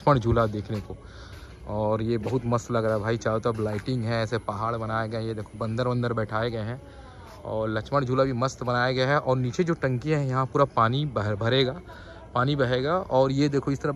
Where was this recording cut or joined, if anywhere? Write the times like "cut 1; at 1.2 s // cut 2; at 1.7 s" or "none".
none